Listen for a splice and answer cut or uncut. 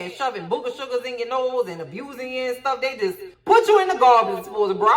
uncut